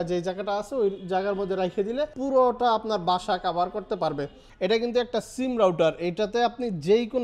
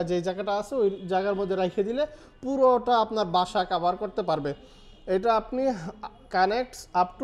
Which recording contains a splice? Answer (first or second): first